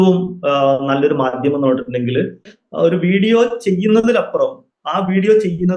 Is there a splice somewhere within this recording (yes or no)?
yes